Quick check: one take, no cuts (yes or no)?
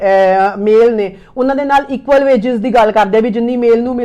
yes